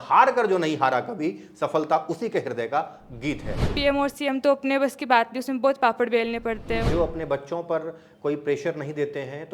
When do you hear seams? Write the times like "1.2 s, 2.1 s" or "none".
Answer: 3.7 s, 6.8 s